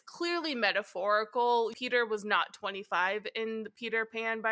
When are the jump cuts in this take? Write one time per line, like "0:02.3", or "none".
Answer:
0:01.8